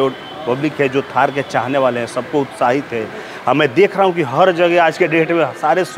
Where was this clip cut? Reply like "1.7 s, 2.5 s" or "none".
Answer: none

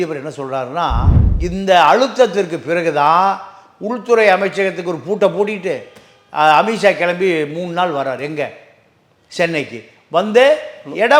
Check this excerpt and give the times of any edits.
1.1 s

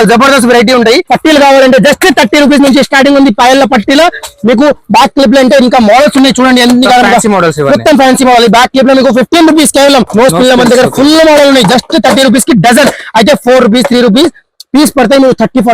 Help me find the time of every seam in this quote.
1.1 s, 10.1 s

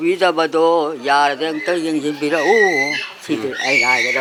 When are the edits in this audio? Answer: none

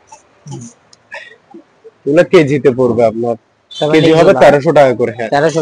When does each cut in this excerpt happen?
none

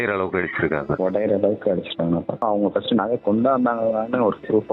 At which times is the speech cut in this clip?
2.4 s

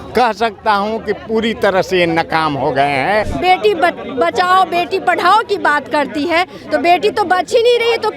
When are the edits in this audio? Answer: 3.3 s

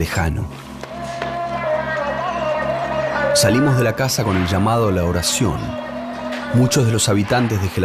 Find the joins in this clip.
4.5 s

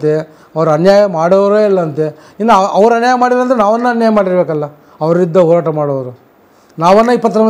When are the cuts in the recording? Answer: none

